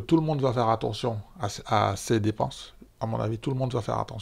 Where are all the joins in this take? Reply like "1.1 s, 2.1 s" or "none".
none